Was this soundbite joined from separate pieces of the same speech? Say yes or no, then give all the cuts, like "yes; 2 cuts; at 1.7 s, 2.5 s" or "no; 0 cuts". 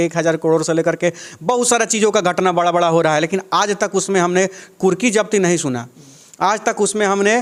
no; 0 cuts